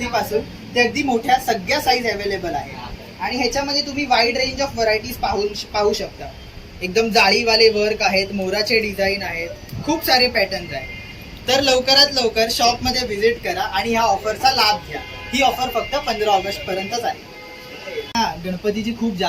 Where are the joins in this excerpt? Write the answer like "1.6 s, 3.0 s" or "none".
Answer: 18.1 s